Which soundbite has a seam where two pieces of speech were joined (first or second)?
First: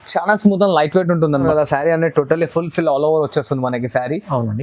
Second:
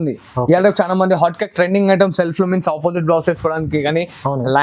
first